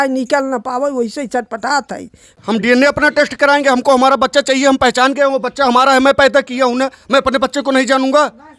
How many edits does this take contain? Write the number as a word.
one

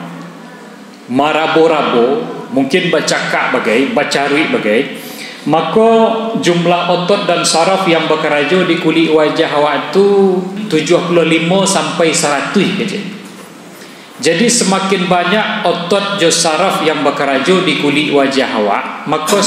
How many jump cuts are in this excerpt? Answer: one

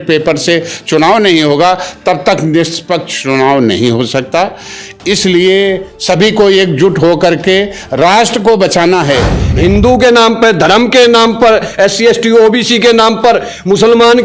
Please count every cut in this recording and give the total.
one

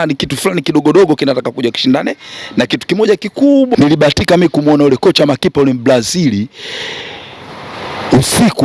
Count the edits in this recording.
one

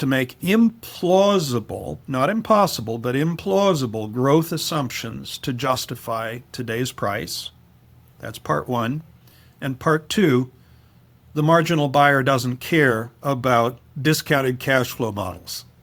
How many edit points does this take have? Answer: zero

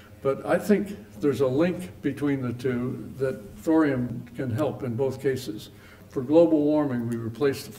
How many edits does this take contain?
three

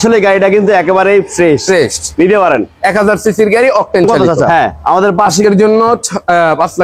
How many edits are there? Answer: one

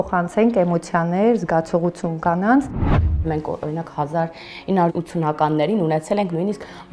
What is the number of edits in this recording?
one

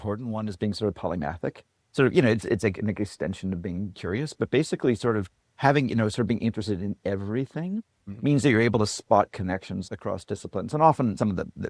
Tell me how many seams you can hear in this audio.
zero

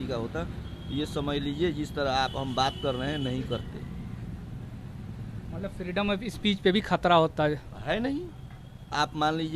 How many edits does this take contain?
zero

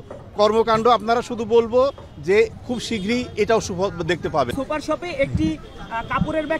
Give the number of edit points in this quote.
one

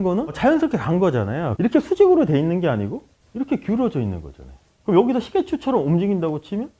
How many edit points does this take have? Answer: one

